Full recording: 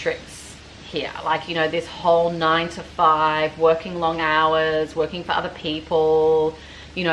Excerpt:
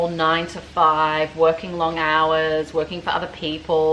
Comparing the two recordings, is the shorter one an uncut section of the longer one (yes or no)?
yes